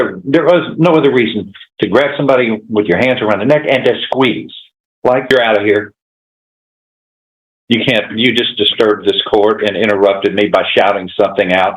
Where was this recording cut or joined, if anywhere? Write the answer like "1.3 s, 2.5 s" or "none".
5.3 s